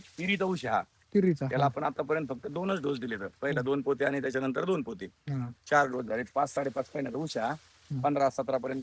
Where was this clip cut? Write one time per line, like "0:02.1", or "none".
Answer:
none